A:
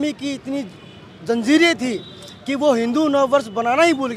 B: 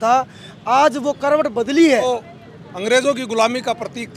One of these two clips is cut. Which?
B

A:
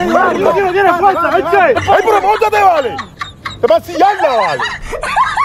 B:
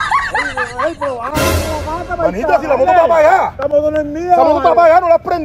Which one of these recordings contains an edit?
A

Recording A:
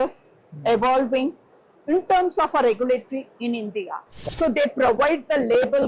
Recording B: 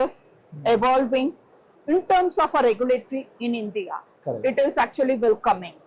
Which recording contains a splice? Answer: A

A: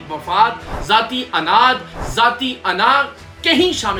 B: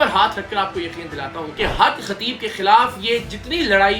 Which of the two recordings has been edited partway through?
B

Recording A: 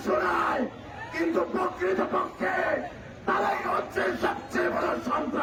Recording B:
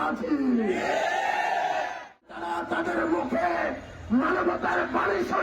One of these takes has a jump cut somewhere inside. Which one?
B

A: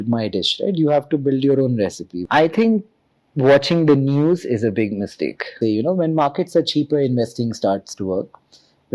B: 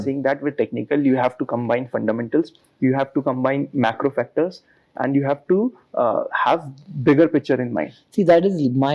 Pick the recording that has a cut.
A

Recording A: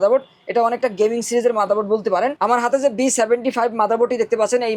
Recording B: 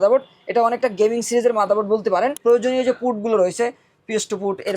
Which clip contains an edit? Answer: B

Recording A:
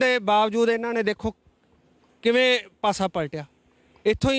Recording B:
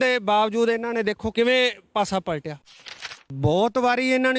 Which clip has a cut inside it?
B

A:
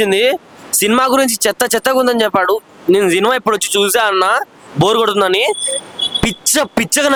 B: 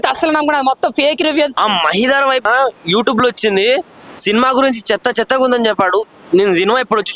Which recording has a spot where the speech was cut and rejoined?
B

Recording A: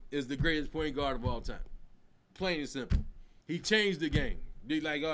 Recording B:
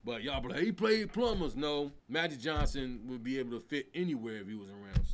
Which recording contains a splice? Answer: B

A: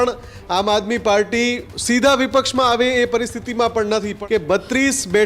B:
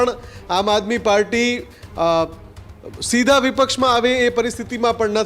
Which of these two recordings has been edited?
A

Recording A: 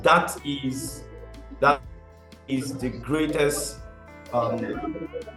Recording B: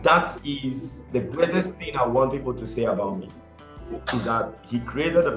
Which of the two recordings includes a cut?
B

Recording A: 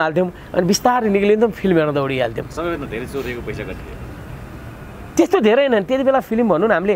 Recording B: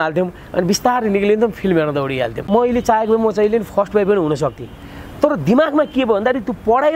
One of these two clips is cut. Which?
B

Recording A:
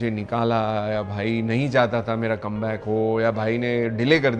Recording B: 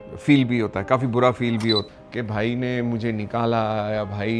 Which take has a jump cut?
B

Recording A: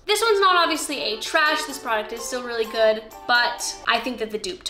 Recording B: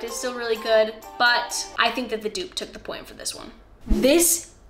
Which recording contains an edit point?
B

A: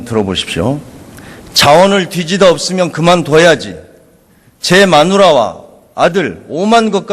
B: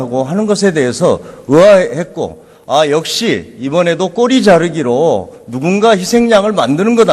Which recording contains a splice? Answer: A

